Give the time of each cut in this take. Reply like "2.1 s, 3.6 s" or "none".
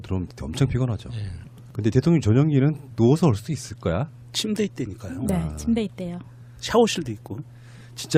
none